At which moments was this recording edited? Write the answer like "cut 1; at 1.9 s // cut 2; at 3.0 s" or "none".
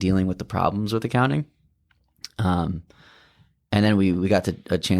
none